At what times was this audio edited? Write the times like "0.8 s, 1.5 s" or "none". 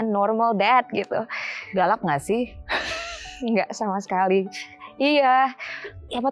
none